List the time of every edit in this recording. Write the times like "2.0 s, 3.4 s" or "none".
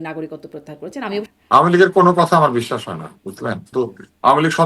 1.3 s, 3.7 s